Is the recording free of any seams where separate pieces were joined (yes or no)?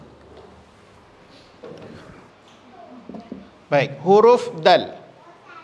no